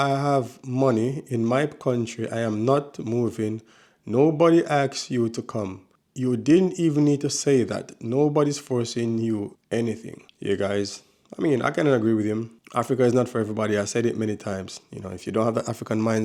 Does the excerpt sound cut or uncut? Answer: uncut